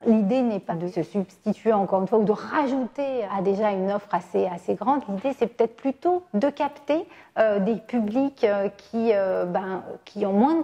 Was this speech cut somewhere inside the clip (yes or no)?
yes